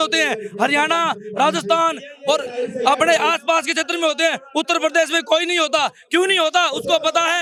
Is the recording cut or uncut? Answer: uncut